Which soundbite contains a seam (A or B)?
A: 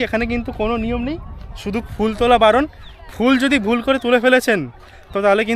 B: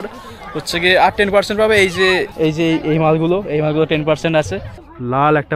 B